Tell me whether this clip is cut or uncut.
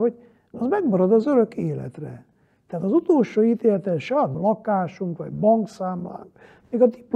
cut